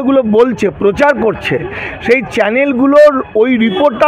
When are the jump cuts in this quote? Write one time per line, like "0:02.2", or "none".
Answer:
none